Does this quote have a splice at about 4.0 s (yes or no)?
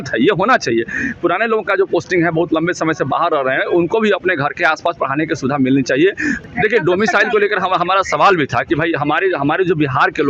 no